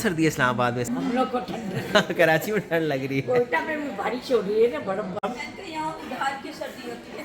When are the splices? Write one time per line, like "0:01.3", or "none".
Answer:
0:00.9
0:05.3